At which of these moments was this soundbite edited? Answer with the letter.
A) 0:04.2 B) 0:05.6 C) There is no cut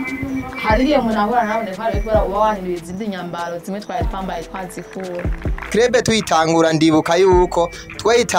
B